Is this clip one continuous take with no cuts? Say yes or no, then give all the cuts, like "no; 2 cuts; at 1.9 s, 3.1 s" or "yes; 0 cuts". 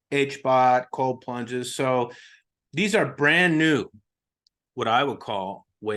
yes; 0 cuts